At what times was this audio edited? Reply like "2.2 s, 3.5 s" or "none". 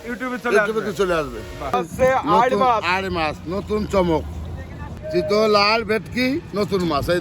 1.7 s, 5.0 s

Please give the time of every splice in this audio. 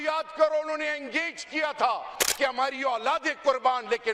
2.2 s

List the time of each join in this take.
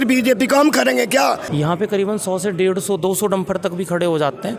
1.5 s

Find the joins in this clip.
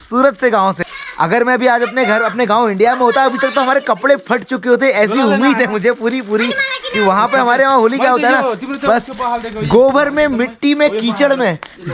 none

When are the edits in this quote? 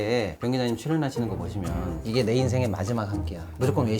2.0 s

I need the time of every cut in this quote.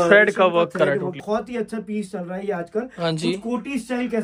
1.2 s

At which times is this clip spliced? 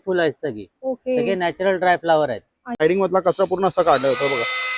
2.8 s

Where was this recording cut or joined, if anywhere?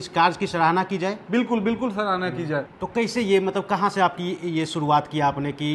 2.8 s

